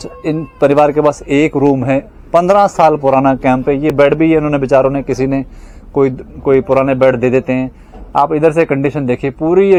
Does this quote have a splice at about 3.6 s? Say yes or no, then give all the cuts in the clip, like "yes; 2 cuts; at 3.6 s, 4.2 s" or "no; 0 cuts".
no; 0 cuts